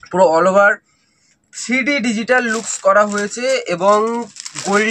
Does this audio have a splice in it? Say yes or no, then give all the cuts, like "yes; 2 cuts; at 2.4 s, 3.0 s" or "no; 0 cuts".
no; 0 cuts